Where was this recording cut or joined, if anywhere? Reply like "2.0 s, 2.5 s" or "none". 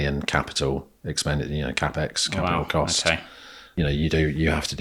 3.7 s